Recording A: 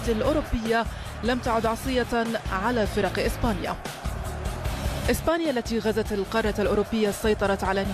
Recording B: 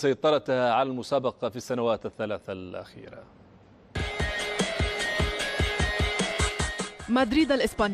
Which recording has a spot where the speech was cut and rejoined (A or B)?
B